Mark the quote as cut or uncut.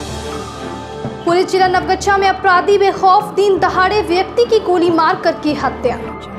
cut